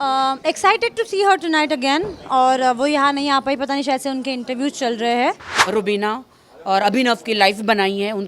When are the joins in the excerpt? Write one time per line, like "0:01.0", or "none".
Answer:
0:05.5